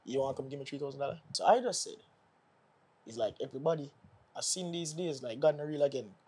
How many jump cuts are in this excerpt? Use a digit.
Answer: 1